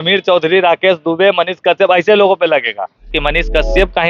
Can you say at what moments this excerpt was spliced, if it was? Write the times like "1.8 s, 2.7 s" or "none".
3.1 s